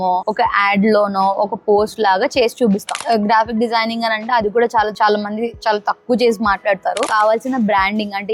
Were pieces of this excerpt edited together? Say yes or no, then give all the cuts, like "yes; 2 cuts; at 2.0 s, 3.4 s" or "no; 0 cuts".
yes; 2 cuts; at 3.0 s, 7.1 s